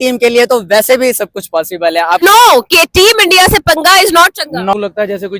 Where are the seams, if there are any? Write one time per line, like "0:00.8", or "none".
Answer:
0:02.2
0:04.7